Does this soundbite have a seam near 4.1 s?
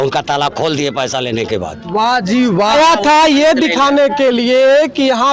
no; 1 cut; at 2.7 s

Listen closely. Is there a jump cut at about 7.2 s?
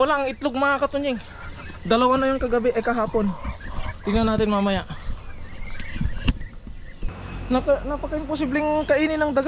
yes; 1 cut; at 7.2 s

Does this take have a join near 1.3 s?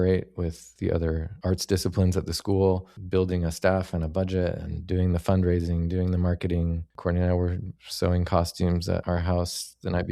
yes; 2 cuts; at 1.3 s, 6.9 s

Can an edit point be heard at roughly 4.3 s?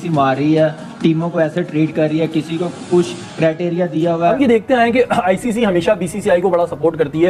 yes; 1 cut; at 4.3 s

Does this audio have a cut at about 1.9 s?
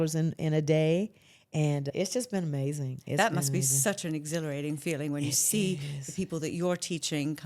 yes; 1 cut; at 1.9 s

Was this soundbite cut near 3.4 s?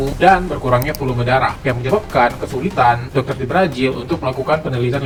no; 0 cuts

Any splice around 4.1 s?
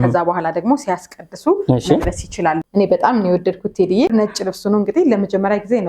yes; 2 cuts; at 2.6 s, 4.1 s

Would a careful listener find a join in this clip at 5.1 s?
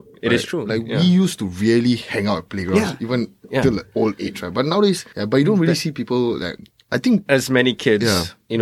yes; 1 cut; at 5.1 s

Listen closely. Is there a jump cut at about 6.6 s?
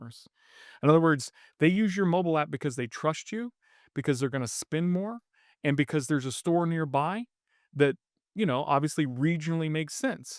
no; 0 cuts

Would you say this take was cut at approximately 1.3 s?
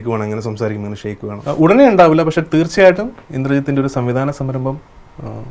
yes; 1 cut; at 1.3 s

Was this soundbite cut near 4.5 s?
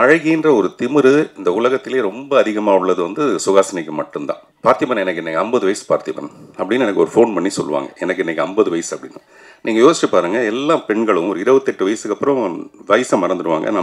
yes; 1 cut; at 4.5 s

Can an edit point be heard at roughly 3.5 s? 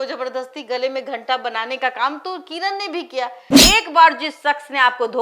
yes; 1 cut; at 3.5 s

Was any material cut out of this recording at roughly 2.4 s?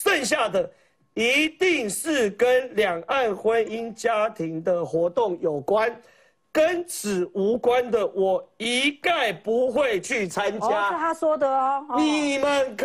no; 0 cuts

